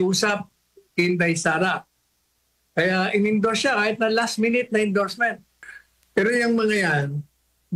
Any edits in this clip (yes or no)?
yes